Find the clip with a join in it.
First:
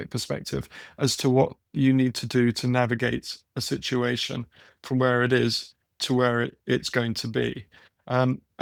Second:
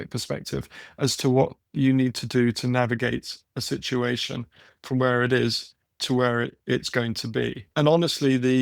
second; 1 cut; at 7.7 s

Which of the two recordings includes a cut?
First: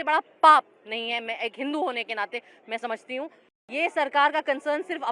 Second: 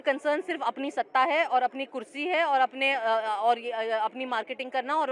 first; 1 cut; at 3.5 s

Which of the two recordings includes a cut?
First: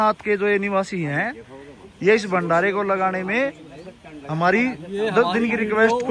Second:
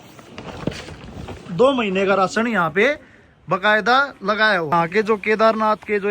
second; 1 cut; at 4.7 s

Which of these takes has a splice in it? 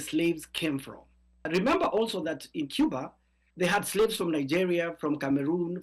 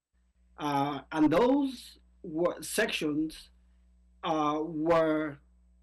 first; 1 cut; at 1.4 s

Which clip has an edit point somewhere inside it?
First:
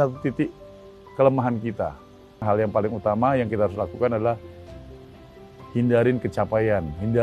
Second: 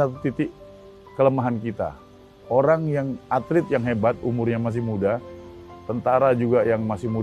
first; 1 cut; at 2.4 s

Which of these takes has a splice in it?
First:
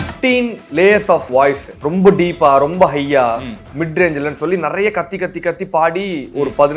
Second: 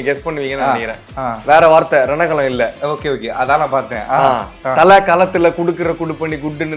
first; 1 cut; at 1.3 s

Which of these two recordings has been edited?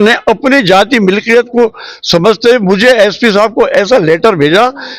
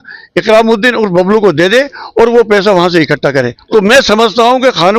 second; 1 cut; at 3.6 s

